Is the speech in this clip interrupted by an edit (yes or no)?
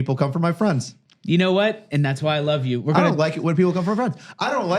no